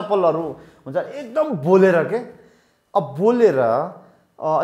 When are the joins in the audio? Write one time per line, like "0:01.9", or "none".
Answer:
none